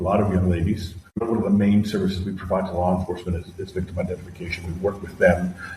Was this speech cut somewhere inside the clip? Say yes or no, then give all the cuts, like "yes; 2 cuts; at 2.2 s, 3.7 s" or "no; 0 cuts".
yes; 1 cut; at 1.2 s